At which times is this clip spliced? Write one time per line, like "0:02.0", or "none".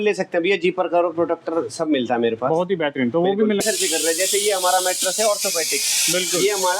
0:03.6